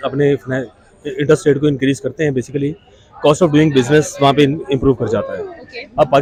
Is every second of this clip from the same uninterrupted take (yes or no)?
yes